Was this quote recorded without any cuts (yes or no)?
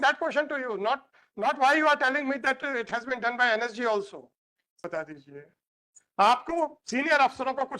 no